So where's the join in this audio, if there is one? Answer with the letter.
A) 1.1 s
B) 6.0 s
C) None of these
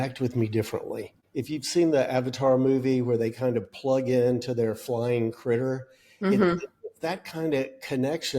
A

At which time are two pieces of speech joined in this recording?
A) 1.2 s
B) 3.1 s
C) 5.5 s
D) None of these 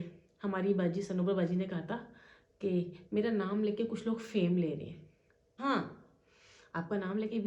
C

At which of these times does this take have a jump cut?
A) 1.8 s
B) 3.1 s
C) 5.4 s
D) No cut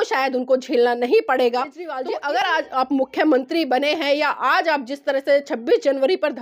A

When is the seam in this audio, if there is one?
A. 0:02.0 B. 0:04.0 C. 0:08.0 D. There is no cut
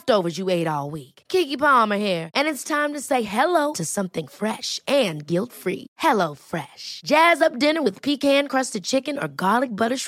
D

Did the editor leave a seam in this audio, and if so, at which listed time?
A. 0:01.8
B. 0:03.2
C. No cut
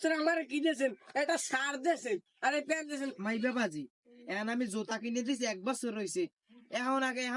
B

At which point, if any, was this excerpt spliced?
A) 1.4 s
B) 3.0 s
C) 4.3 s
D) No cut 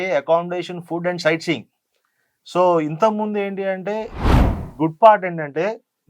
C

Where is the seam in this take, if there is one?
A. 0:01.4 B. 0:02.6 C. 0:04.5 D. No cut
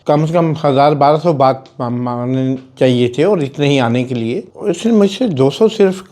C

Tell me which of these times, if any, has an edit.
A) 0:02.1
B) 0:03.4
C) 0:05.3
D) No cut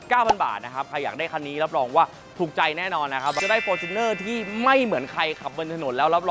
B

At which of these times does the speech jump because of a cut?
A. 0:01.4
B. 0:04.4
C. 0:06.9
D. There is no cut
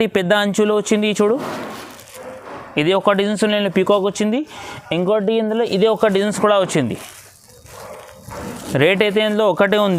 D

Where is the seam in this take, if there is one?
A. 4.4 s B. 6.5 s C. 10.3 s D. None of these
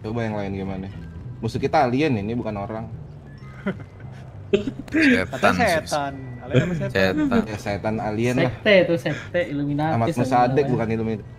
D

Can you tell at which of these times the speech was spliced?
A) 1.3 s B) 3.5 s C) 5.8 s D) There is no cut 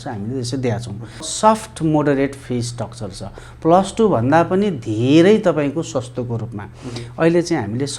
A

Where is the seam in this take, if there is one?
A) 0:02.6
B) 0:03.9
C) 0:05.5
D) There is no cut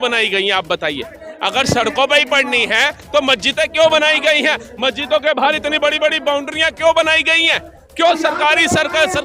D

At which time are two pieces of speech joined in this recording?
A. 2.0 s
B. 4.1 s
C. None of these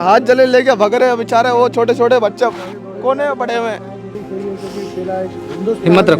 B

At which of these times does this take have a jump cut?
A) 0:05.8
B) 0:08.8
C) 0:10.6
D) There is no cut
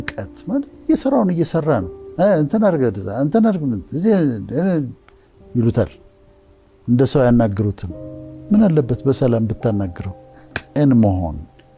C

